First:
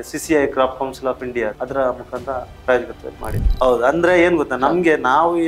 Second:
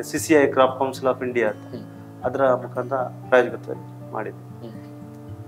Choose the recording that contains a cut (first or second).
first